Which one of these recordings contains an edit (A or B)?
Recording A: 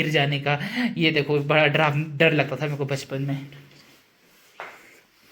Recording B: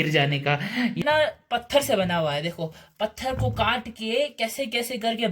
B